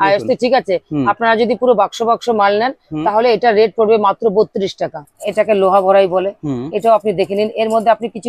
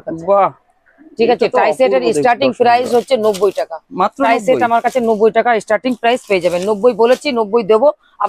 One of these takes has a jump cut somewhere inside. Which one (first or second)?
first